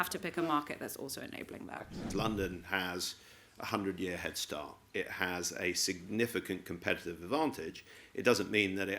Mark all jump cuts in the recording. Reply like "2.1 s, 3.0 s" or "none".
2.1 s

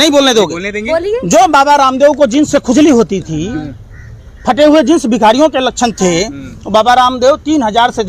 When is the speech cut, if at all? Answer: none

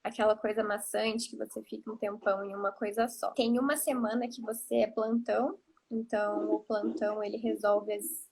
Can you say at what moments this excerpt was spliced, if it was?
1.7 s, 3.3 s

